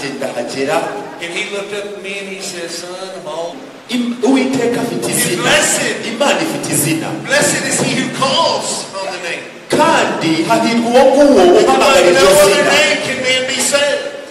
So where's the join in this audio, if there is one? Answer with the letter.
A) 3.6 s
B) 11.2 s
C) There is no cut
A